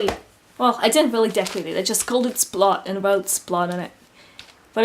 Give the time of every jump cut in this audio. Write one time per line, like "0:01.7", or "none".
0:03.7